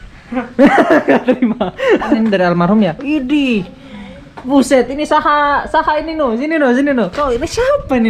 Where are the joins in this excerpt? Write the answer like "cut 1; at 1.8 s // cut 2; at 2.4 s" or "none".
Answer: cut 1; at 2.2 s

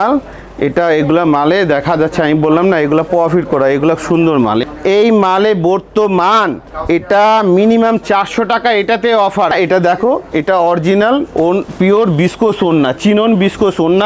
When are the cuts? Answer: cut 1; at 4.7 s // cut 2; at 9.5 s

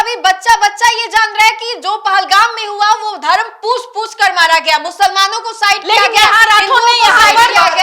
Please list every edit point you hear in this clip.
none

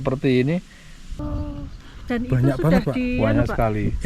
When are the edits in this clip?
cut 1; at 1.2 s

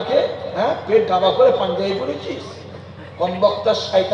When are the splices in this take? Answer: none

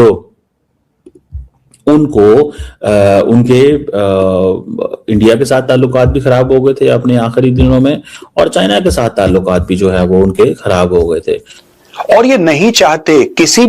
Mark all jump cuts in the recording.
cut 1; at 11.6 s

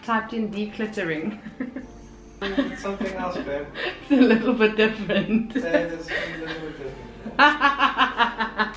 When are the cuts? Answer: cut 1; at 2.4 s

